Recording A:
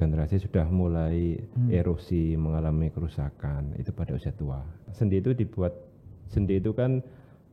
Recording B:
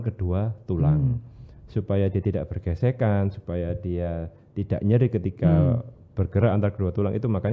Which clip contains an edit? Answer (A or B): A